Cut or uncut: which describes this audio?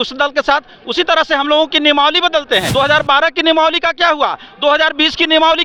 cut